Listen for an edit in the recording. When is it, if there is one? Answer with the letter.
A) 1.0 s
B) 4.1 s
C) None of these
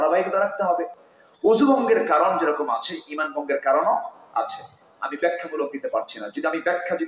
A